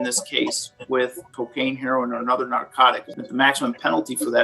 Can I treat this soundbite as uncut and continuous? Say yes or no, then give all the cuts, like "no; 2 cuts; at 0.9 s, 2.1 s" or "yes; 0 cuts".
no; 2 cuts; at 1.3 s, 3.1 s